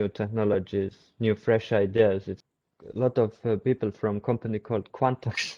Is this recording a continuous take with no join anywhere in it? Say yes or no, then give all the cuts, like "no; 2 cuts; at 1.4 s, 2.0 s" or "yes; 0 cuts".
no; 1 cut; at 2.4 s